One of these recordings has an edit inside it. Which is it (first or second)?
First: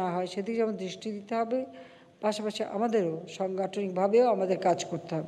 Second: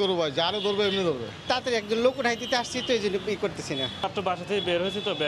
second